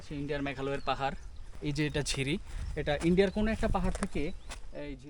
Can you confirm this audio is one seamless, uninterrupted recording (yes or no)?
no